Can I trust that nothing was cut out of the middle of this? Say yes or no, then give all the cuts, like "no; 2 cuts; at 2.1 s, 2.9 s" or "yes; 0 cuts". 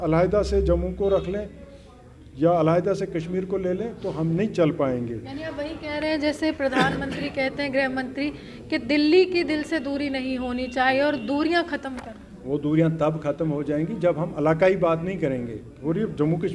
yes; 0 cuts